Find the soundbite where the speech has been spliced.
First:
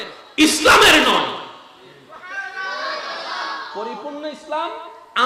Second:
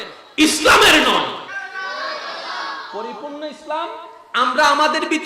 second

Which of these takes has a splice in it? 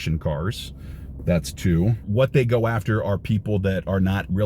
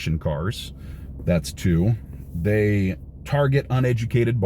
first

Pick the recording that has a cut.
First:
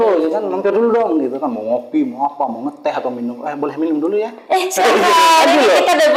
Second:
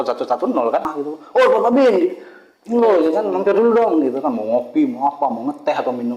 second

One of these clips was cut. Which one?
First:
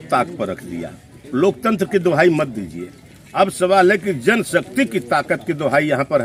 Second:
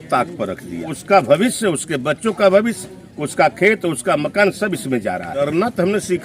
second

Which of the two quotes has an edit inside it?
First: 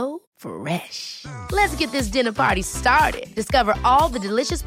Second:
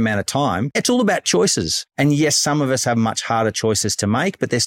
second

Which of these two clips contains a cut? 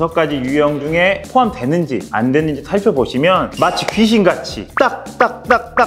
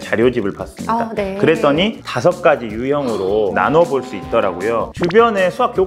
second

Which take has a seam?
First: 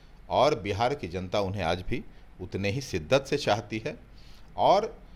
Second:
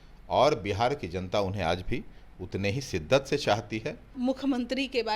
second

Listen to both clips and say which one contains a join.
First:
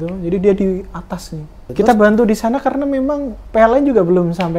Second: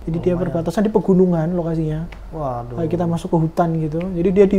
first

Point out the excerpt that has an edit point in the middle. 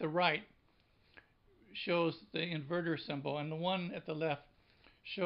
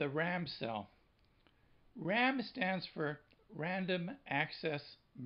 first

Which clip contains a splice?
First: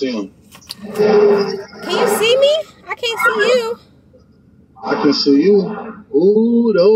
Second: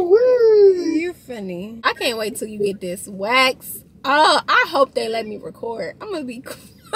second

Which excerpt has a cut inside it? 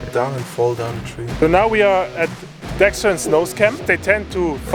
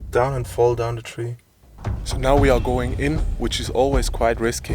first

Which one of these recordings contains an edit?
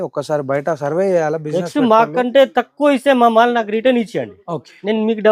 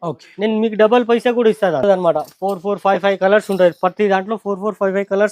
second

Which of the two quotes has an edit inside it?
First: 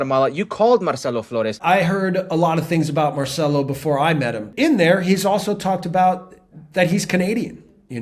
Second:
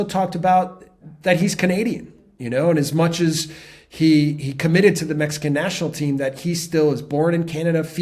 first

